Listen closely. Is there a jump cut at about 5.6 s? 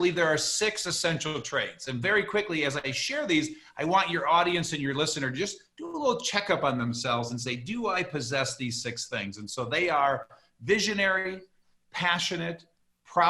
no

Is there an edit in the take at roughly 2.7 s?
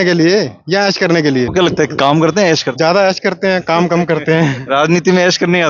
yes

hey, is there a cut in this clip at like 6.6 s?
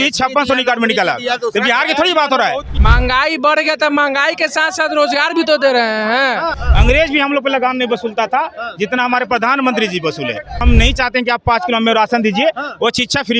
yes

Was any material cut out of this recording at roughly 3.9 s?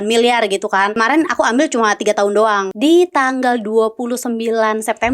no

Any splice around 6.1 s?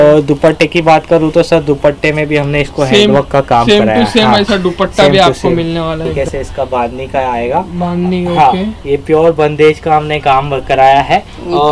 yes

